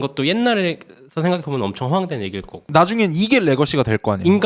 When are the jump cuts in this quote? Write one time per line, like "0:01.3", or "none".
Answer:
0:02.7